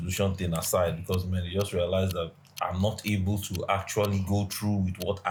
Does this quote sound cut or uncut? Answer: uncut